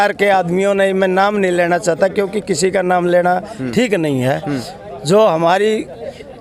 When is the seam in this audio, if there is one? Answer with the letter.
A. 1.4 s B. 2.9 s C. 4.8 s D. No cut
D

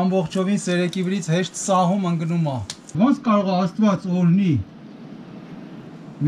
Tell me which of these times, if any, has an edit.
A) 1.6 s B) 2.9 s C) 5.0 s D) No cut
B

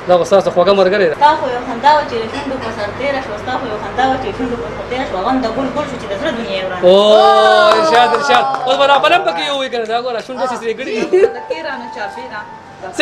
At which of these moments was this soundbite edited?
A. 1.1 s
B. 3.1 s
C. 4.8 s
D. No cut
A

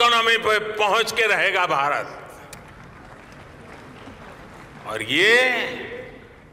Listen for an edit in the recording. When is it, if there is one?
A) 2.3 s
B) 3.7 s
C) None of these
C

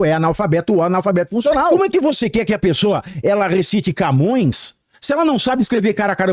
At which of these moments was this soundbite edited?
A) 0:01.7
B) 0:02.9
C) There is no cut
A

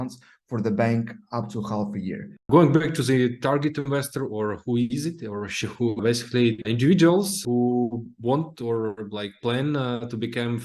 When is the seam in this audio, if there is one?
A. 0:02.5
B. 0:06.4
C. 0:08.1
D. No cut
A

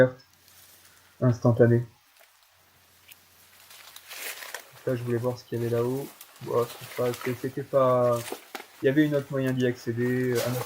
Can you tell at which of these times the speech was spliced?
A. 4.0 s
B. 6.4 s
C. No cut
A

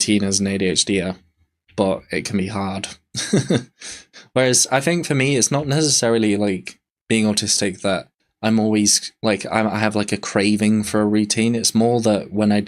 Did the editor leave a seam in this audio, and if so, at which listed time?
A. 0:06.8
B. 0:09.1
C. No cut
C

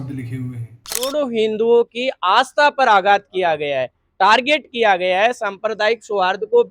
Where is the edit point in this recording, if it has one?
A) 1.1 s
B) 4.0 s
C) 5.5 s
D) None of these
A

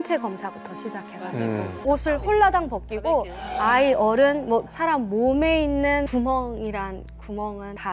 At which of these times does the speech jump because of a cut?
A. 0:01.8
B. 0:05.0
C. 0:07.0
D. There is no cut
A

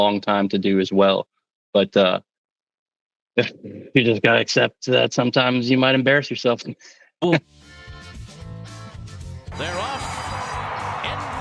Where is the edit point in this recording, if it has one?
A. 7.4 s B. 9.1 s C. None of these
A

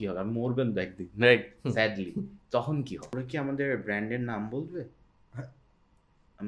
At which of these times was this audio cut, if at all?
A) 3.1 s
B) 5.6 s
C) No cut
A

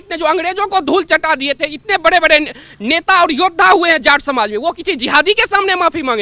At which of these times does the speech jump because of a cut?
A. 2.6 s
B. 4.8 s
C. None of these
C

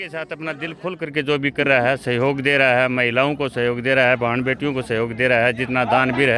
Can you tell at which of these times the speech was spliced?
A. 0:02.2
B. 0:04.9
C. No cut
C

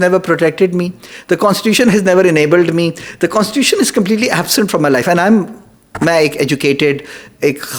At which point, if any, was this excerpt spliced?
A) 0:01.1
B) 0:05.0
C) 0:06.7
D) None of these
D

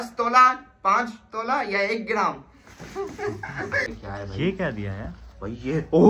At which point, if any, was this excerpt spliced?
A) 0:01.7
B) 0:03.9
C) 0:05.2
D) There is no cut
B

